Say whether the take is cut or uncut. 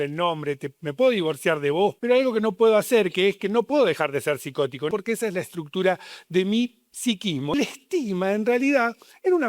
cut